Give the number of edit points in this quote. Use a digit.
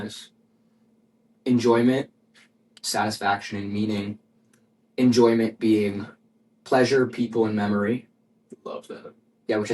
0